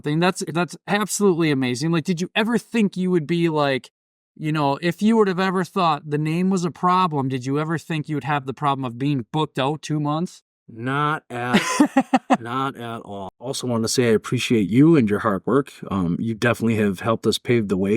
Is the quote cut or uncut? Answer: cut